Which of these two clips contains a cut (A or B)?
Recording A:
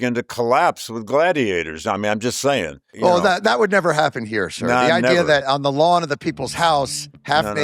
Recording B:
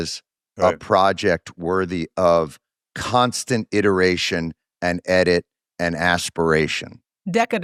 A